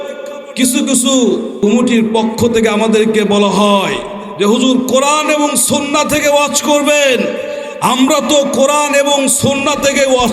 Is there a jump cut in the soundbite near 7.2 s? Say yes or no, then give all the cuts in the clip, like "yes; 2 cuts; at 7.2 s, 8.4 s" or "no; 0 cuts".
no; 1 cut; at 1.5 s